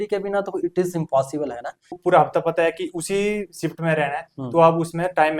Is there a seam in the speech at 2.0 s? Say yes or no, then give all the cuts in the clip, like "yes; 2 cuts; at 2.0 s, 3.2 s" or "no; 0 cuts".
yes; 1 cut; at 2.0 s